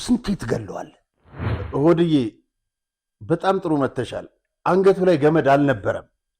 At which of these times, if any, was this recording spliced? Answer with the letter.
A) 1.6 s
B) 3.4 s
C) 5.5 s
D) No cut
A